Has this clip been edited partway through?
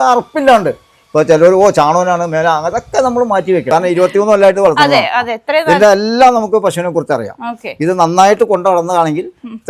yes; 1 cut; at 3.7 s

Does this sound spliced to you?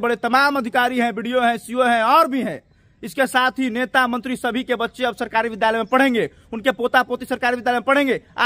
no; 0 cuts

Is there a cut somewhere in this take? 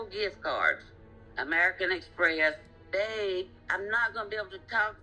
yes; 1 cut; at 2.7 s

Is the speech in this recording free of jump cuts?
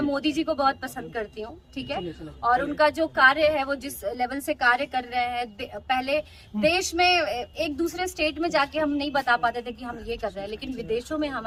yes; 0 cuts

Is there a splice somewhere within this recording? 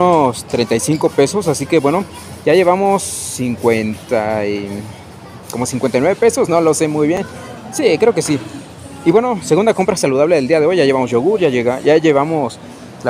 no; 0 cuts

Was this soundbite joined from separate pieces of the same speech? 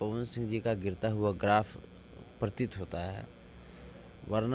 no; 0 cuts

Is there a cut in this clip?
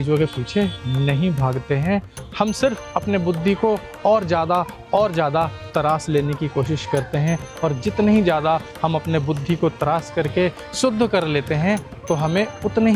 no; 0 cuts

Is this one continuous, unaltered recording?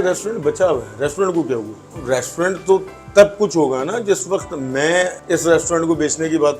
no; 2 cuts; at 1.9 s, 5.2 s

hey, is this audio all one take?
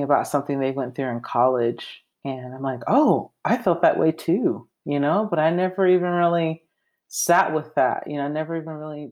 yes; 0 cuts

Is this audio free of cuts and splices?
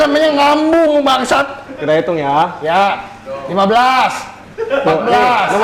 yes; 0 cuts

